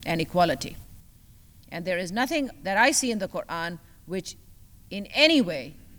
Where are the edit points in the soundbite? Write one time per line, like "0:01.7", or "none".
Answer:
none